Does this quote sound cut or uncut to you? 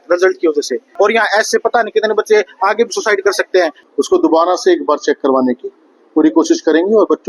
cut